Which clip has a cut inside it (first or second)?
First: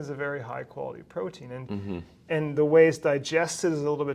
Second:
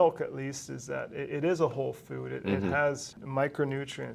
second